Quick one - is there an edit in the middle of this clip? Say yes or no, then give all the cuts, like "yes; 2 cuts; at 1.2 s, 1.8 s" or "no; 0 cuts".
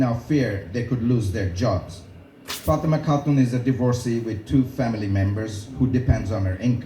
yes; 1 cut; at 5.4 s